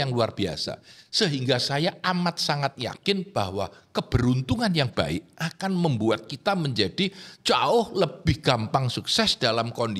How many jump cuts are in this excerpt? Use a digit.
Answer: 0